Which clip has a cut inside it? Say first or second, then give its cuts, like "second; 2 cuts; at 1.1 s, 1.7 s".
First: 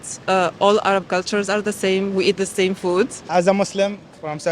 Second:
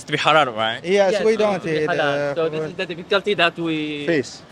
first; 1 cut; at 3.2 s